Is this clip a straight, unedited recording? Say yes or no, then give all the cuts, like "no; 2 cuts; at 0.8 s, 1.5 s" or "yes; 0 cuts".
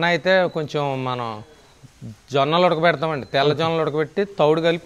yes; 0 cuts